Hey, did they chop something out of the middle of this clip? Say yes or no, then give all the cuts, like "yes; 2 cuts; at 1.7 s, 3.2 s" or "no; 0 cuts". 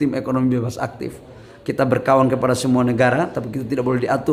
no; 0 cuts